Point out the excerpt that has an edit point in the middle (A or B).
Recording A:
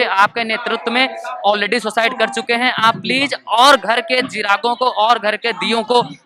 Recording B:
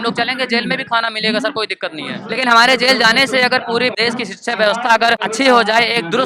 B